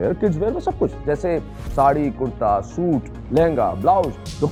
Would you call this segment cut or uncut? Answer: uncut